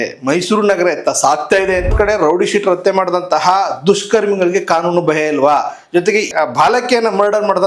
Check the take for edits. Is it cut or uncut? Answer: cut